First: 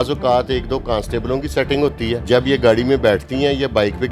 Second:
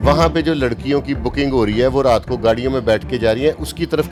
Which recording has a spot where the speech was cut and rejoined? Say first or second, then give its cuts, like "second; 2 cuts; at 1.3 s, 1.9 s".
first; 1 cut; at 2.2 s